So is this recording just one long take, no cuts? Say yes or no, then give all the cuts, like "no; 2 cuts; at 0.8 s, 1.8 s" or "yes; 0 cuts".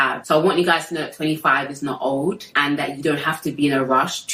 yes; 0 cuts